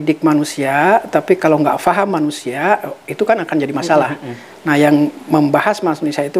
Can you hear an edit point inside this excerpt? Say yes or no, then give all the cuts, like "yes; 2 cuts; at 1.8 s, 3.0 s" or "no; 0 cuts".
no; 0 cuts